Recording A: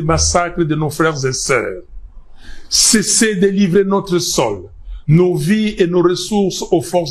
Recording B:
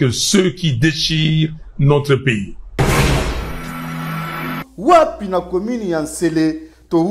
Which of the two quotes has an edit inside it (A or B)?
B